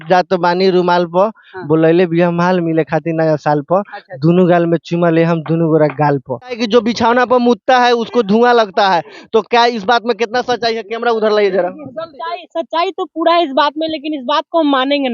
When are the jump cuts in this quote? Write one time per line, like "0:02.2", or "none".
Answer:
0:06.6